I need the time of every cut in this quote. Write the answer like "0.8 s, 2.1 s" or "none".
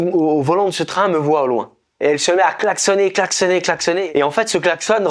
4.0 s